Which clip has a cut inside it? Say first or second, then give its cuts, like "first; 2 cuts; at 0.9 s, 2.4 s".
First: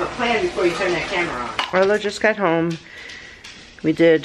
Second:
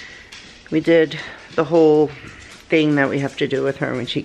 first; 1 cut; at 1.4 s